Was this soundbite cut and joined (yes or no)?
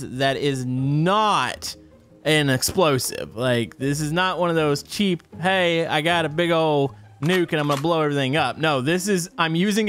no